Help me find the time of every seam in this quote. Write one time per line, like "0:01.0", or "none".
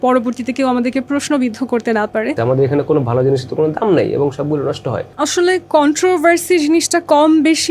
0:02.4
0:05.1